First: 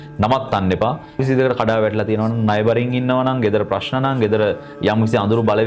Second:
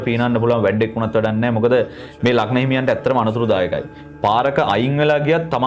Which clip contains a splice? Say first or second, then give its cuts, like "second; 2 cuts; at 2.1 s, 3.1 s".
first; 1 cut; at 1.2 s